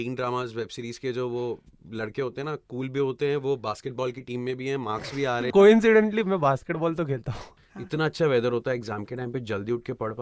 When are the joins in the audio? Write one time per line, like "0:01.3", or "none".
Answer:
0:05.5
0:07.4